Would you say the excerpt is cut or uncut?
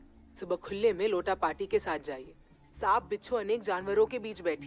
uncut